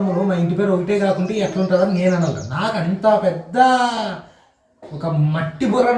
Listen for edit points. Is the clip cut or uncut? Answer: uncut